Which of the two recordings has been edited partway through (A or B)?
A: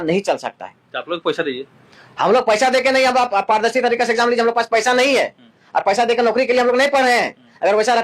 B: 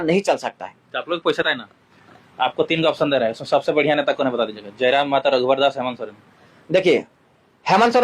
B